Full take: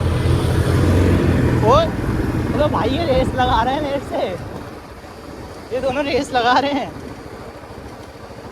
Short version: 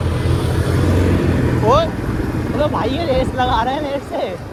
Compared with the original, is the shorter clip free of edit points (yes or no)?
yes